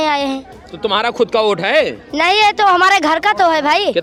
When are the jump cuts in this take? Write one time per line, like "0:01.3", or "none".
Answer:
none